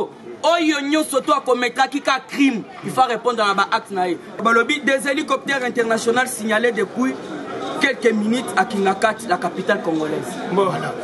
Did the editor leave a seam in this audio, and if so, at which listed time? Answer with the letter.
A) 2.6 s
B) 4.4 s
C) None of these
B